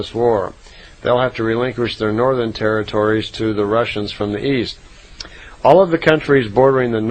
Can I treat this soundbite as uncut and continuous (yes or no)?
yes